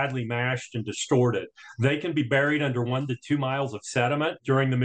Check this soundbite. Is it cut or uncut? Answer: uncut